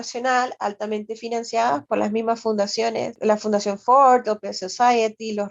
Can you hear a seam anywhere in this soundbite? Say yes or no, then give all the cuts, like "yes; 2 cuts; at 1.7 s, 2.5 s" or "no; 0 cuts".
yes; 2 cuts; at 1.8 s, 3.1 s